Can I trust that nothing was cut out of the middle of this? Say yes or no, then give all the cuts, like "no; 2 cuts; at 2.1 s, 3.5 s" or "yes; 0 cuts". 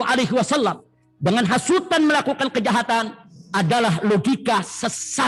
yes; 0 cuts